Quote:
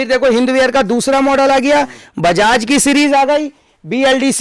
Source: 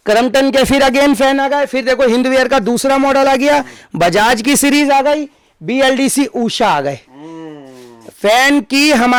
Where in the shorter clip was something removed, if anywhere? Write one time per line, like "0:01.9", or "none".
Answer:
none